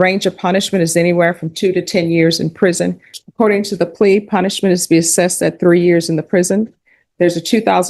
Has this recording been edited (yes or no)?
yes